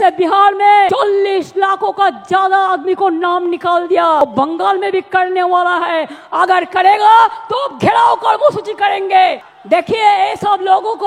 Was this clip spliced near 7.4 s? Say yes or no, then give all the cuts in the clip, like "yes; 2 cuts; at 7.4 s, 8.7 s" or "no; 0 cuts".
no; 3 cuts; at 0.9 s, 4.2 s, 9.5 s